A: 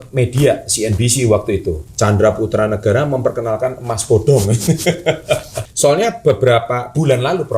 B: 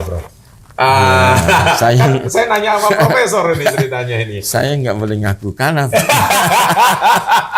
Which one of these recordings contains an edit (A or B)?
A